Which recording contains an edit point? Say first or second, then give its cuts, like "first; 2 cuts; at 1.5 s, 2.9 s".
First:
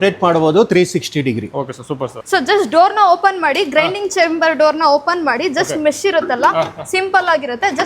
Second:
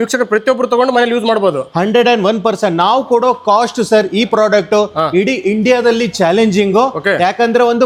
first; 1 cut; at 2.2 s